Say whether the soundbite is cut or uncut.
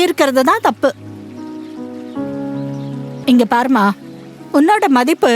cut